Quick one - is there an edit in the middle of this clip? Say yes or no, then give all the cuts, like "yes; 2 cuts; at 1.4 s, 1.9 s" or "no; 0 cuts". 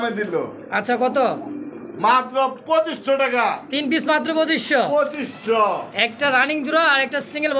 no; 0 cuts